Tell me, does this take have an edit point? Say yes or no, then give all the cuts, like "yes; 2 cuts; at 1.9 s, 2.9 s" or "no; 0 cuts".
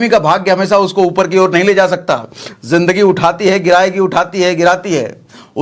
no; 0 cuts